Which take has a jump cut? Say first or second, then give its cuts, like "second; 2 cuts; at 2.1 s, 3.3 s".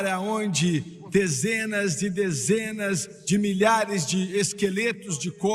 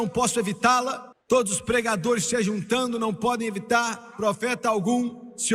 second; 1 cut; at 1.1 s